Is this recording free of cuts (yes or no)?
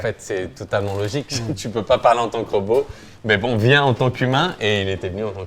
yes